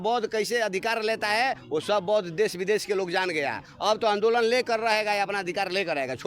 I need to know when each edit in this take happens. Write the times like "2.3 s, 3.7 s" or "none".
none